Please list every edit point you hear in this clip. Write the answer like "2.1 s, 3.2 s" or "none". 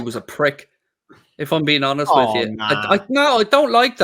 none